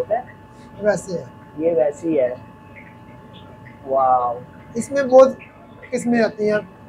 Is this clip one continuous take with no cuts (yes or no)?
yes